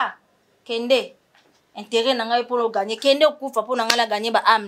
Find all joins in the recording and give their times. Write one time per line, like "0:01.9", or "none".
none